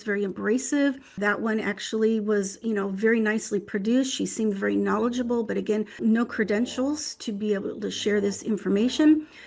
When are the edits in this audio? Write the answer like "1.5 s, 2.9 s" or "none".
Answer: 6.0 s